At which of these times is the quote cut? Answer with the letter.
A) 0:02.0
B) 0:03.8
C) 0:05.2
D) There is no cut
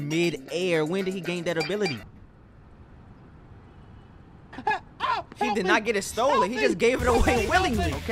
A